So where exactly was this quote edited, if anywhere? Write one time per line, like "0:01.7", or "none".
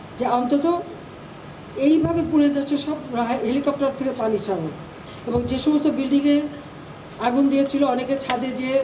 0:05.0